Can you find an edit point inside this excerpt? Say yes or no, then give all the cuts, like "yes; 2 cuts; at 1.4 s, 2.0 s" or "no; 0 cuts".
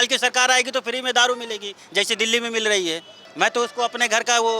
yes; 1 cut; at 3.2 s